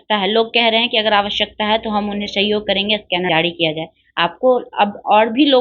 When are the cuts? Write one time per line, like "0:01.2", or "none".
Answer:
0:03.3